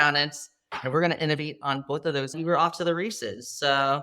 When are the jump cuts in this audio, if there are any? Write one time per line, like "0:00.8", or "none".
0:02.3